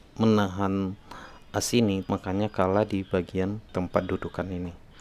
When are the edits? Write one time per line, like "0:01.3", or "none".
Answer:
0:02.1
0:03.6